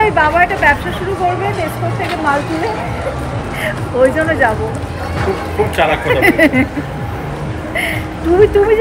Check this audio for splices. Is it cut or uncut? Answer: uncut